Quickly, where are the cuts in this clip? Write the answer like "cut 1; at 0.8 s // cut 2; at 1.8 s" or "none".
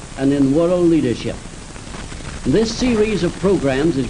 none